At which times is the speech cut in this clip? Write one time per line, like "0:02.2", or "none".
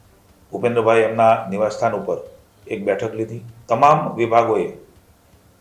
0:03.5